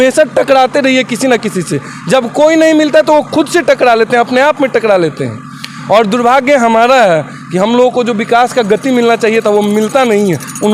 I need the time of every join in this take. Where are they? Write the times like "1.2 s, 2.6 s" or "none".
none